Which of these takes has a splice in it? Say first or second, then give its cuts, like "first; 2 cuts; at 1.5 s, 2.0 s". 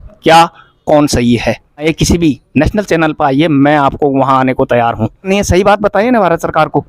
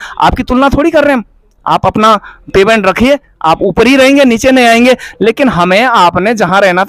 first; 2 cuts; at 1.9 s, 5.3 s